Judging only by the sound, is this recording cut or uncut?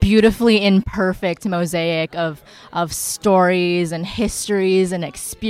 uncut